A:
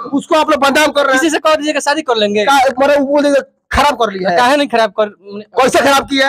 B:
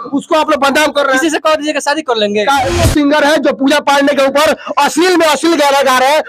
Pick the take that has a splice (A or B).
B